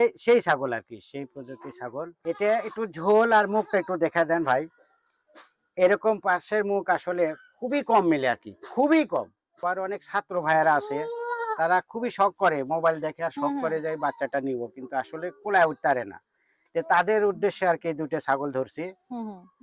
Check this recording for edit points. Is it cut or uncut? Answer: cut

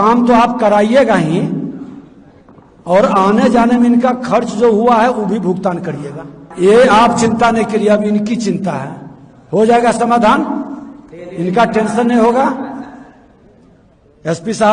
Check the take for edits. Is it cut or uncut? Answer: cut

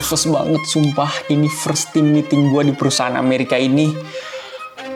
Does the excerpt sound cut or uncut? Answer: uncut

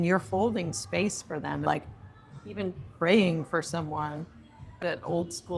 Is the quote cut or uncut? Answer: cut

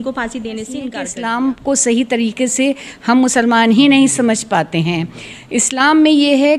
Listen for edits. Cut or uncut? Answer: cut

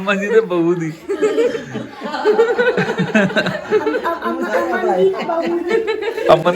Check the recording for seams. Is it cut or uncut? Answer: uncut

